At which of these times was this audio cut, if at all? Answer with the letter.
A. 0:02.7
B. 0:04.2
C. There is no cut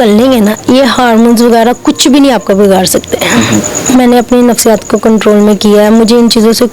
C